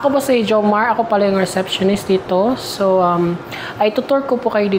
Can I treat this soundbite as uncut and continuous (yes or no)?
yes